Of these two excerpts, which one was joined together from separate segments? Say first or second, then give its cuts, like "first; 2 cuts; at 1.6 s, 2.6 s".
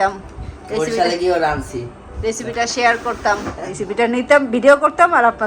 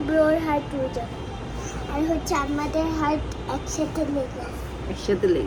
first; 1 cut; at 3.7 s